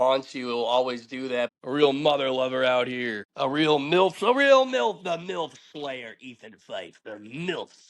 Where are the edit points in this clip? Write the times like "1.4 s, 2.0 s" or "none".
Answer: 1.6 s, 3.2 s